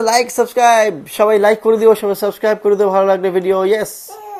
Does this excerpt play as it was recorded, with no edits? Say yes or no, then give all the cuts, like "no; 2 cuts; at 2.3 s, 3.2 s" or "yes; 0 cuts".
yes; 0 cuts